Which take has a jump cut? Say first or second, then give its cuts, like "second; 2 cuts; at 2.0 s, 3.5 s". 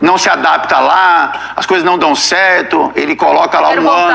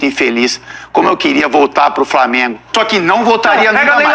second; 1 cut; at 2.6 s